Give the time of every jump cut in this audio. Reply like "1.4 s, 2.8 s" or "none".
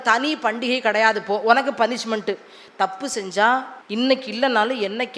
3.8 s

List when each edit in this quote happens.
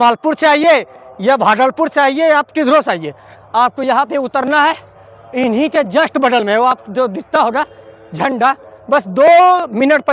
none

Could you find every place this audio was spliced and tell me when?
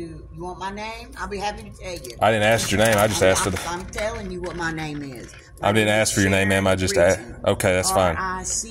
none

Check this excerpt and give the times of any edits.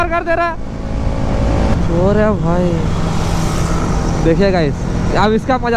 none

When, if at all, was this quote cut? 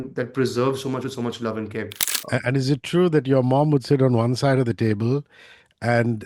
2.0 s

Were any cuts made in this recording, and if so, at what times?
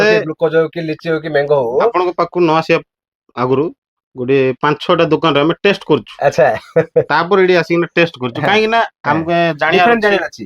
none

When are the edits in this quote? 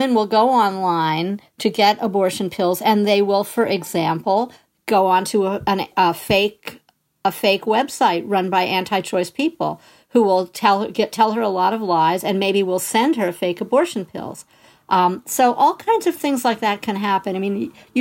none

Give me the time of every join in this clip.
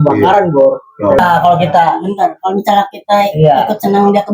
1.2 s

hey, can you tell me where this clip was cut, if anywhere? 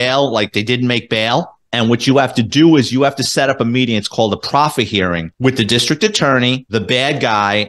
1.6 s, 5.3 s, 6.6 s

